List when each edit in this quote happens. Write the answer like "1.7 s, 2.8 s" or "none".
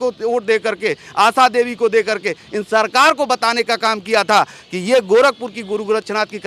none